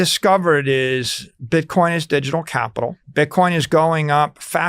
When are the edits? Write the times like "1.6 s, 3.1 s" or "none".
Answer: 3.0 s